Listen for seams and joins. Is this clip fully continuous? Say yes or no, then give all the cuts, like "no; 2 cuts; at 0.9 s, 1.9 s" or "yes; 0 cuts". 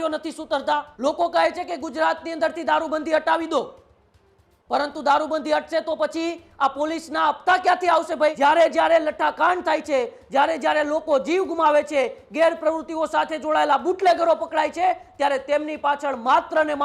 no; 2 cuts; at 0.9 s, 8.4 s